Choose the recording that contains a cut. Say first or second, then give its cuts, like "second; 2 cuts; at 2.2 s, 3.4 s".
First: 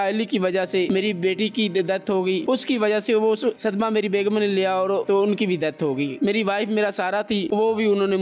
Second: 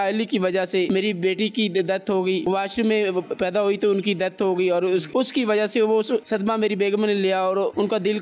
first; 3 cuts; at 2.4 s, 5.0 s, 6.2 s